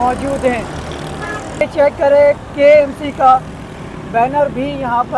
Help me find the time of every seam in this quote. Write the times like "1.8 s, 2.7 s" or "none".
1.6 s